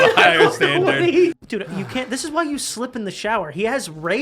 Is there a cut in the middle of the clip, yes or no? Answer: yes